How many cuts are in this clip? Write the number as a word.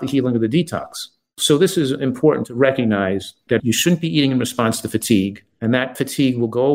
two